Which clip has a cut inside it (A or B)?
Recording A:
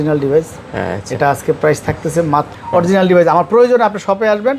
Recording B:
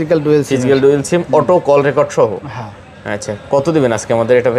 A